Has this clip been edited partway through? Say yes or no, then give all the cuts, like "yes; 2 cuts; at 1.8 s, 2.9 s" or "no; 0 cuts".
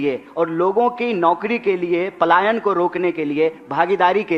no; 0 cuts